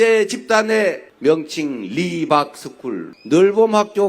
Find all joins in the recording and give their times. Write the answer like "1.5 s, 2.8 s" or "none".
3.1 s